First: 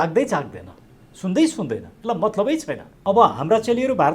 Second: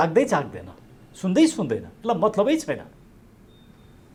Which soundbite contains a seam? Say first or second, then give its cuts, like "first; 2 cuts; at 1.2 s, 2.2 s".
first; 1 cut; at 2.9 s